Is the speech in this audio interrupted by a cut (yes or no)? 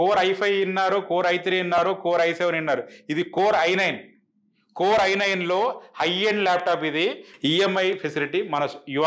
yes